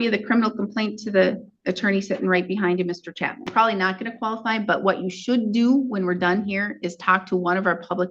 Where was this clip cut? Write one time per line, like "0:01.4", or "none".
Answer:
0:03.5